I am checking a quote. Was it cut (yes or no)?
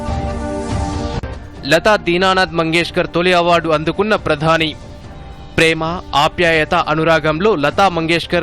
yes